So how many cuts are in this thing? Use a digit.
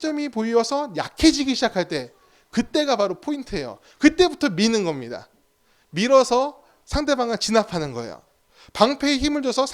0